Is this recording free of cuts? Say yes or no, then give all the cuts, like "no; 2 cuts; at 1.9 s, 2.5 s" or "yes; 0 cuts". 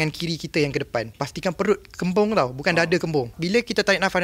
no; 2 cuts; at 1.2 s, 3.4 s